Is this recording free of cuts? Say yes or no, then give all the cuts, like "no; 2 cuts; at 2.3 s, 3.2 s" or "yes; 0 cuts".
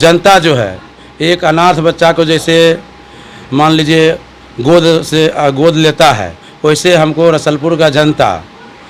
yes; 0 cuts